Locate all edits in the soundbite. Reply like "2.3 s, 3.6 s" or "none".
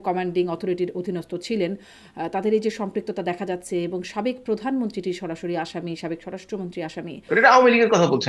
7.3 s